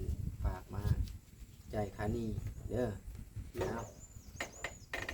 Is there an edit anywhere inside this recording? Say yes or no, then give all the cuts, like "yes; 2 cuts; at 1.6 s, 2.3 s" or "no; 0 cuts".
yes; 1 cut; at 3.6 s